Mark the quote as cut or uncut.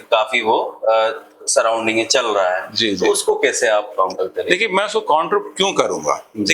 uncut